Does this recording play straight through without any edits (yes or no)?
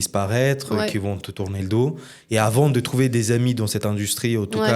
yes